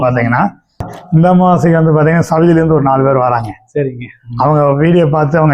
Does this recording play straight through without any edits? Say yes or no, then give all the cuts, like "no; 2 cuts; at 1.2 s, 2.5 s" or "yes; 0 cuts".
no; 1 cut; at 0.9 s